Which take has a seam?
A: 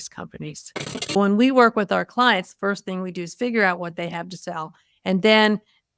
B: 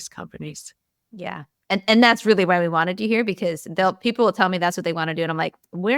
A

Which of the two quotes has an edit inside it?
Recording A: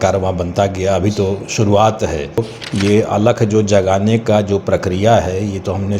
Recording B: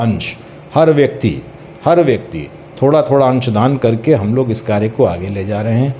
A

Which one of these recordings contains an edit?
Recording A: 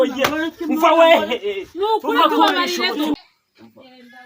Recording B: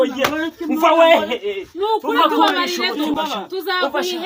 A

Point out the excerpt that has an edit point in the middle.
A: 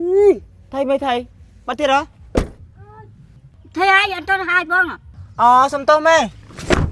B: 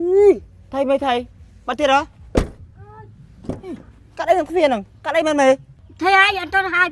A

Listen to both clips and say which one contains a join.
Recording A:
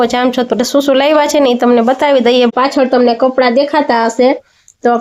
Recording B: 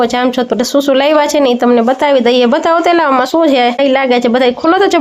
A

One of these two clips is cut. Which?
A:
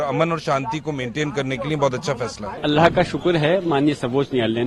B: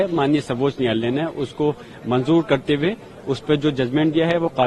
A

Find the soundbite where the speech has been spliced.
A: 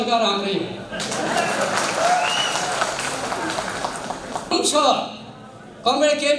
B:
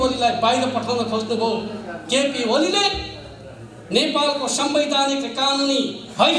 A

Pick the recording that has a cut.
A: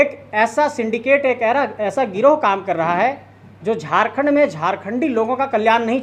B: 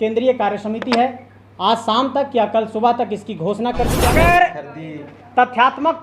B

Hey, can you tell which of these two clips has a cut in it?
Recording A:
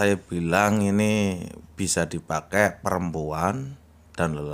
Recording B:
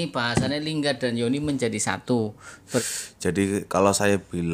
B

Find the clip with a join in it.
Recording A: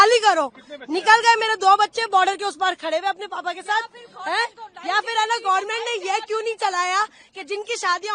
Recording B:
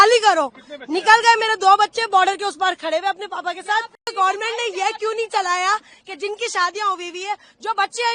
B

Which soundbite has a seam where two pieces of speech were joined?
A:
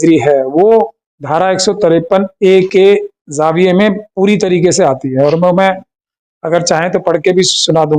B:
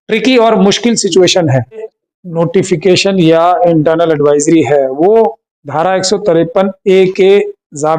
B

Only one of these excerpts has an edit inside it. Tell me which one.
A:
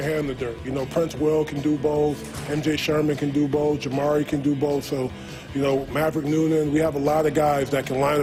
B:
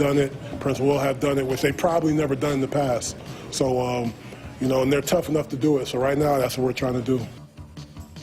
B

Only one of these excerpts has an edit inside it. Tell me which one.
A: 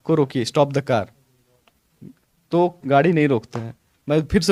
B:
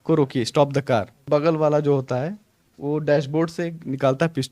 B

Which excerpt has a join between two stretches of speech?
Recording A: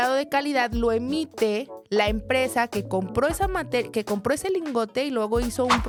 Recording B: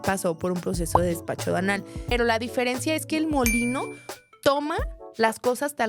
B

